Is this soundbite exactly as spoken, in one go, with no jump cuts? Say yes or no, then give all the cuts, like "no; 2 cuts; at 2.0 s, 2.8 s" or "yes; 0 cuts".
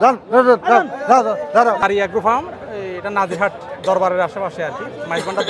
no; 1 cut; at 1.8 s